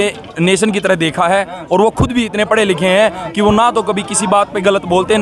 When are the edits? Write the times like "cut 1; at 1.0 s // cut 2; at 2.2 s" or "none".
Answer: none